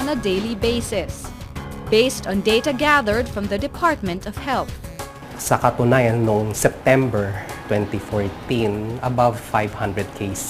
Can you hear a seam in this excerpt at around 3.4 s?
no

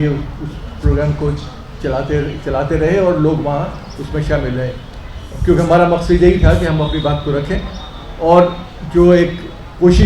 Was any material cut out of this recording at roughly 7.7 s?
no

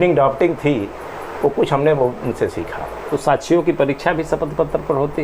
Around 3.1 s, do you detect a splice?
yes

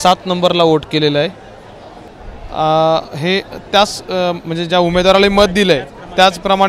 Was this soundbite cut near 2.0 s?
yes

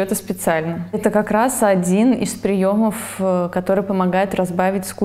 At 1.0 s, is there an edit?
yes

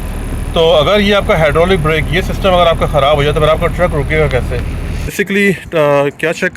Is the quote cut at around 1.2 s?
no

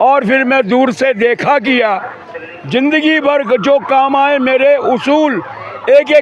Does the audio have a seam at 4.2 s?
no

